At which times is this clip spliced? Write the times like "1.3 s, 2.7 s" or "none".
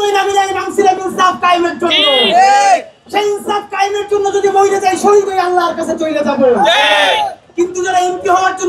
none